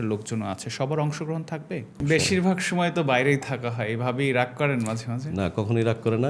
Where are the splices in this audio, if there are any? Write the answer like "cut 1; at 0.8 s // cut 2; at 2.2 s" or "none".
cut 1; at 1.9 s